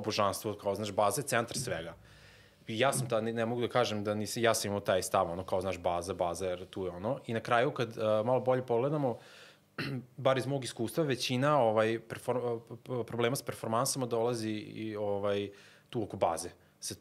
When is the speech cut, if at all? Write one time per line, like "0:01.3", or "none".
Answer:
none